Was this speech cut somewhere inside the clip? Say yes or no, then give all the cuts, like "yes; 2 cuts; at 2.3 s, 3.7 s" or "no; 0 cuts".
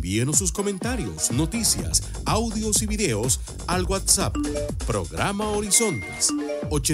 no; 0 cuts